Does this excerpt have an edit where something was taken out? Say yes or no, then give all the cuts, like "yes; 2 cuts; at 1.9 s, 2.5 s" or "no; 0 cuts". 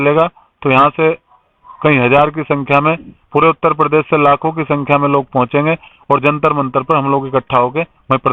no; 0 cuts